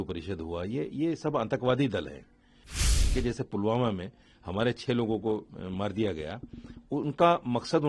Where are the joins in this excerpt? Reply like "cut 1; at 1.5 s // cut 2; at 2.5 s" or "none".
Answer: cut 1; at 2.9 s